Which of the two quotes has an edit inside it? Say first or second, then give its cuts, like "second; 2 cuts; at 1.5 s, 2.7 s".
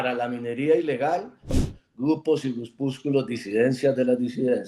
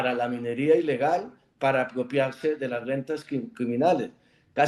first; 1 cut; at 1.5 s